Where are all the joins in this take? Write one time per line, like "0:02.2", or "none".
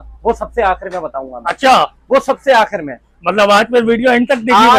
none

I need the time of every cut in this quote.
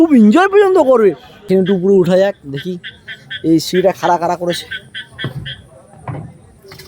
0:01.3

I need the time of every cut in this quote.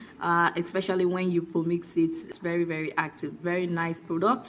0:02.2

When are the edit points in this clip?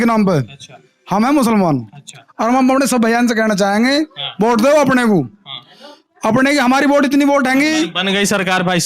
none

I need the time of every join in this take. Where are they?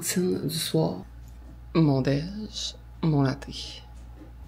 0:01.1

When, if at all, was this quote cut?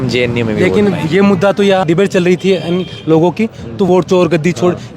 0:01.8
0:03.9

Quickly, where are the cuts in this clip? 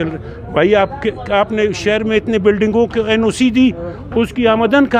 none

